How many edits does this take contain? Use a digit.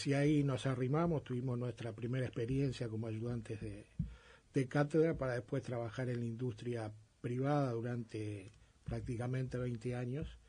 1